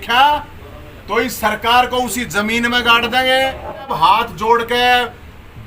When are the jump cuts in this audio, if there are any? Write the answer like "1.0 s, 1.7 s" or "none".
3.9 s